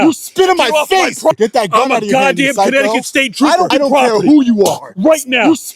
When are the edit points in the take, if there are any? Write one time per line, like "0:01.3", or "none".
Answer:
0:01.3
0:03.7